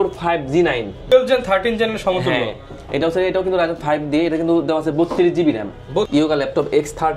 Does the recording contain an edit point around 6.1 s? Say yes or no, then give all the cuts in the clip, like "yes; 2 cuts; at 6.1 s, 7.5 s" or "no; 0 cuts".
yes; 2 cuts; at 1.1 s, 6.1 s